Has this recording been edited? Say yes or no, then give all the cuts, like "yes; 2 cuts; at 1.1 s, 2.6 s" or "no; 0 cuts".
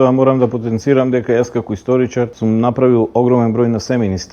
yes; 1 cut; at 2.3 s